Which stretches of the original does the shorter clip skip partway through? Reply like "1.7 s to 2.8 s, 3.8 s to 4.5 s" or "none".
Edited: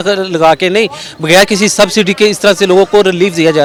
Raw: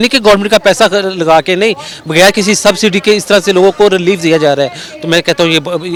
none